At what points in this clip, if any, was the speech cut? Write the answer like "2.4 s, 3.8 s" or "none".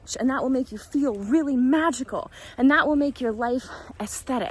none